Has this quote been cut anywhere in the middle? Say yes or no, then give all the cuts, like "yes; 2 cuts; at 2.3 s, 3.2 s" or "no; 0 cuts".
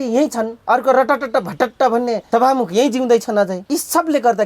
yes; 2 cuts; at 2.2 s, 3.6 s